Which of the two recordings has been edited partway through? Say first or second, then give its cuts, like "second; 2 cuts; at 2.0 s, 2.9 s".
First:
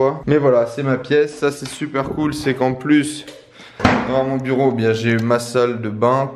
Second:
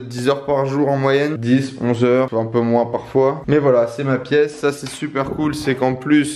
second; 2 cuts; at 1.4 s, 2.3 s